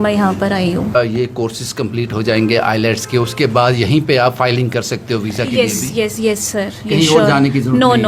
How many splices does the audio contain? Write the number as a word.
one